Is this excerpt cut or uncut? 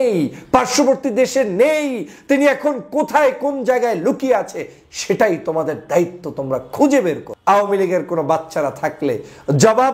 cut